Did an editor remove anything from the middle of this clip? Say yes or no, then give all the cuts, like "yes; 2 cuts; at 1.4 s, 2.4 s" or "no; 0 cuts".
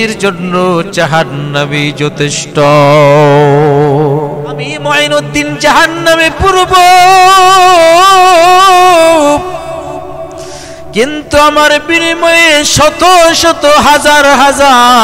yes; 1 cut; at 4.8 s